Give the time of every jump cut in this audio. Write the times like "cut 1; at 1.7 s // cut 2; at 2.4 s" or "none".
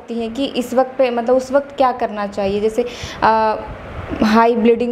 none